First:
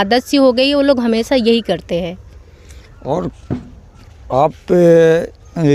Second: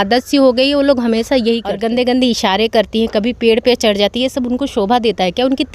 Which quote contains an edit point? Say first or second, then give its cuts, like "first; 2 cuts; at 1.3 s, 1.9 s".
second; 1 cut; at 1.8 s